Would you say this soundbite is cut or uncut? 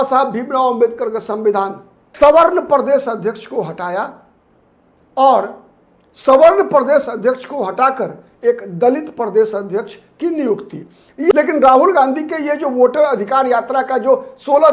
cut